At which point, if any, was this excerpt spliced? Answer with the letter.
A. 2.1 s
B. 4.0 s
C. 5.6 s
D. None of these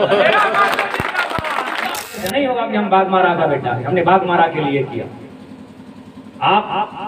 A